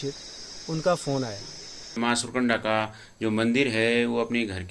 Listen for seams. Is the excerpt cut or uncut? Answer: cut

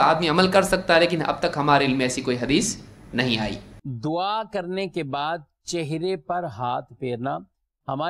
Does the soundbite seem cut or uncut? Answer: uncut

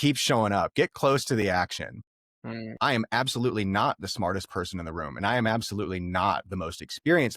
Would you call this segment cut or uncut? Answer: cut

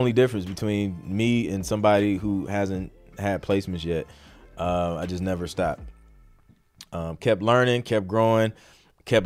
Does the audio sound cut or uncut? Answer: uncut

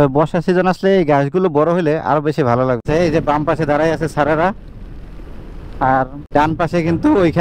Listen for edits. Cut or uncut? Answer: cut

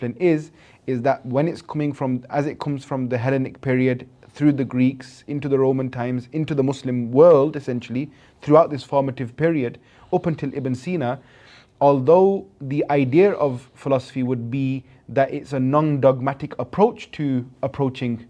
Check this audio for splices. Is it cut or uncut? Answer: uncut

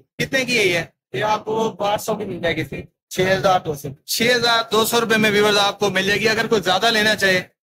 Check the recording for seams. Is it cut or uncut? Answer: uncut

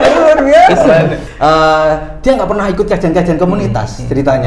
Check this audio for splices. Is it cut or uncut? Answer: cut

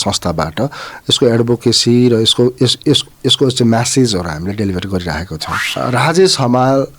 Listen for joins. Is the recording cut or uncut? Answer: cut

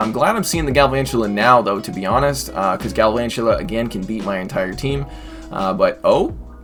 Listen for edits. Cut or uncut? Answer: uncut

